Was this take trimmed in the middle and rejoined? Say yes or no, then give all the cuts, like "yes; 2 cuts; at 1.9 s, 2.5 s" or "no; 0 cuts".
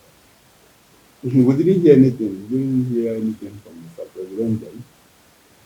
no; 0 cuts